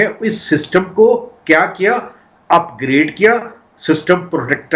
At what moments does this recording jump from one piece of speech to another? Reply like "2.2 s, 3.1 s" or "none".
none